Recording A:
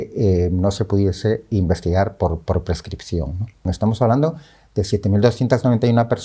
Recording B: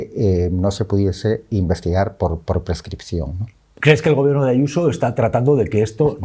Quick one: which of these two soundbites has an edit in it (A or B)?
A